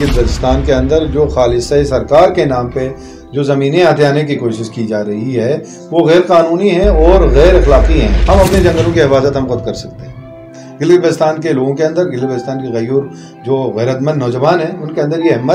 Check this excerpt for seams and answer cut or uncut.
cut